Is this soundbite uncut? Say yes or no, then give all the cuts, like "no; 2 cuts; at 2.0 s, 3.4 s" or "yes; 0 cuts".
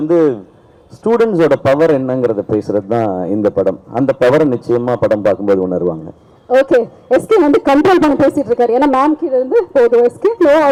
yes; 0 cuts